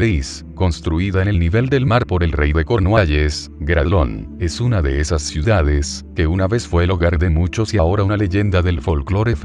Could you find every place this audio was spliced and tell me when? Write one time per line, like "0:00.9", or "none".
0:06.3